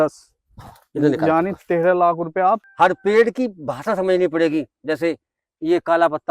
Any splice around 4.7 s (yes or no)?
no